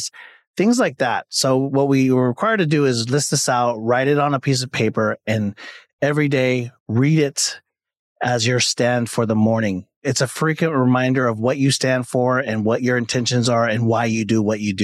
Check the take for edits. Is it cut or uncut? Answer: uncut